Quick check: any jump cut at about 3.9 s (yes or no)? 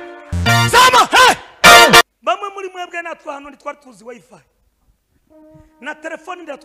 no